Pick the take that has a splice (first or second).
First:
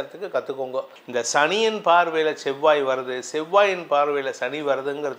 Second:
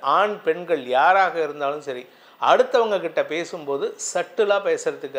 first